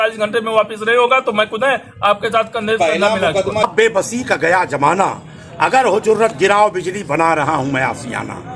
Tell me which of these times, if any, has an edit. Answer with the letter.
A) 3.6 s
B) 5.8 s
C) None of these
A